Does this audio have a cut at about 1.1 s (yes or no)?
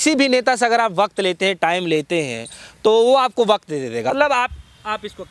no